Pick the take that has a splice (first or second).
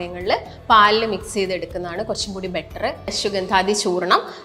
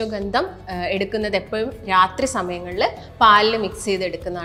first